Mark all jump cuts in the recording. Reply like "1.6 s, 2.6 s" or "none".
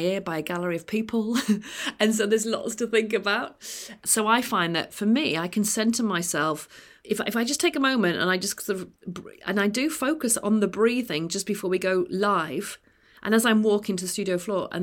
3.9 s